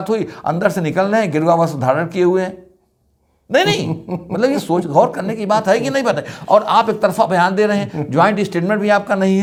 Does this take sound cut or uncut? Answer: uncut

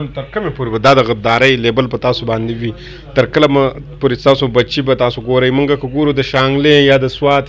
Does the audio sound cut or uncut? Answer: uncut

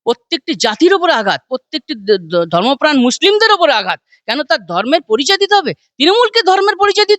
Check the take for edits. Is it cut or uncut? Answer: uncut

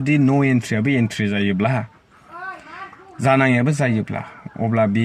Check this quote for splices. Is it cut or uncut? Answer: uncut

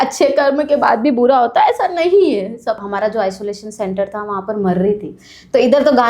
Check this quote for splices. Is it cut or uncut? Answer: cut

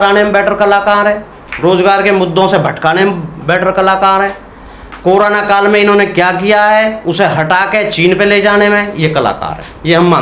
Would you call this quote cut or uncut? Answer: uncut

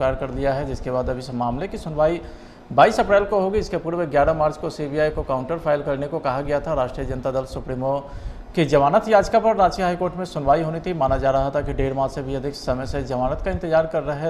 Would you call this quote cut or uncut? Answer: uncut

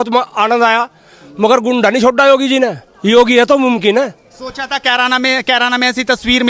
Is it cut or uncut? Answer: uncut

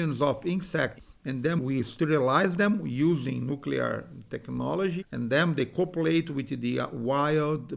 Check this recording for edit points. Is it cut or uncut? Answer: cut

